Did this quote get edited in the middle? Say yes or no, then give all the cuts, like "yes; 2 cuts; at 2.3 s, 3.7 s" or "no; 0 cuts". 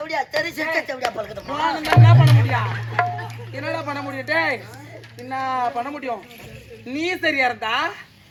no; 0 cuts